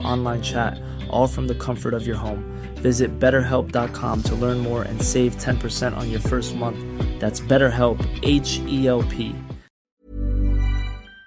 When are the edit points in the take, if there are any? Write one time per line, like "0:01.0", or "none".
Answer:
0:10.0